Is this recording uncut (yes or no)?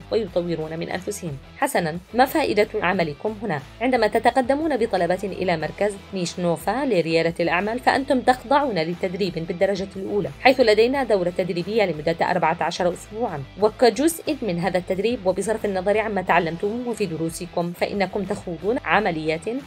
no